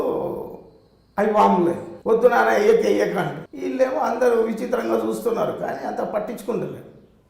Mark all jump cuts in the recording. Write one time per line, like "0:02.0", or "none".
0:01.9
0:03.5